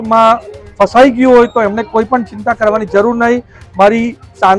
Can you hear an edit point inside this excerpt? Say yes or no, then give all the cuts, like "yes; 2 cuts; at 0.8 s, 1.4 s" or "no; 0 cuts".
no; 0 cuts